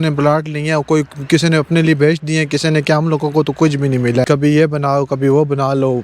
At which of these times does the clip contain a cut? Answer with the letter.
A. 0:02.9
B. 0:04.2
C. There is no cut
B